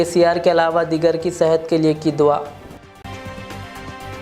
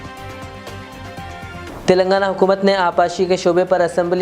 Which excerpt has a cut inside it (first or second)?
second